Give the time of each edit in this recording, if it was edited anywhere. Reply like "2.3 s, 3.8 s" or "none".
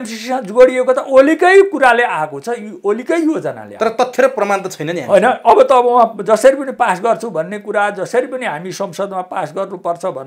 none